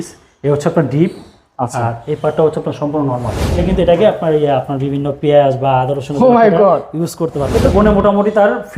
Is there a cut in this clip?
yes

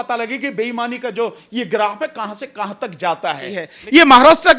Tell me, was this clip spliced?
yes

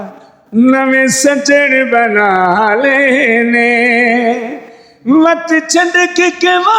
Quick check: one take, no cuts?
yes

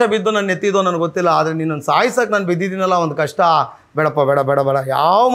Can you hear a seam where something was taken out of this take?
no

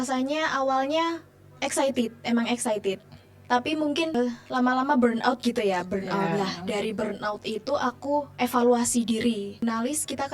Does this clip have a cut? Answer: yes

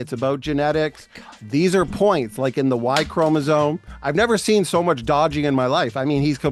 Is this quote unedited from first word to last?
yes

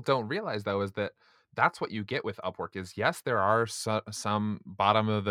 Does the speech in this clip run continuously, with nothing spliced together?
yes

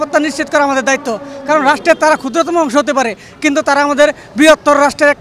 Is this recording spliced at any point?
no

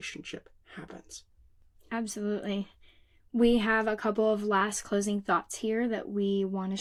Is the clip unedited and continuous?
yes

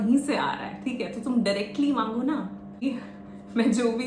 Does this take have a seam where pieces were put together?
yes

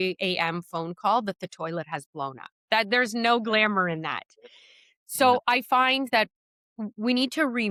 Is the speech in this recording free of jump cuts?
yes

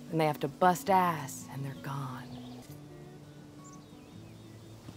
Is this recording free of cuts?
no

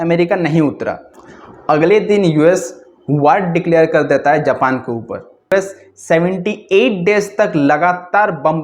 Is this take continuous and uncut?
no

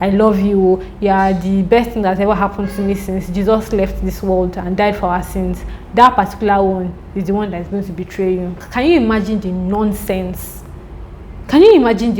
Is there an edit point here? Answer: yes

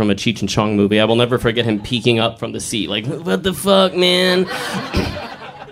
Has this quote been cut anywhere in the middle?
yes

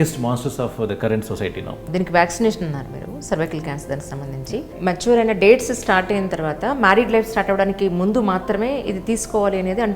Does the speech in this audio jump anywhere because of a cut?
yes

